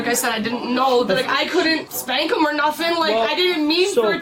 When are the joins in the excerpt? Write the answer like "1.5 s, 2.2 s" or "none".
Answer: none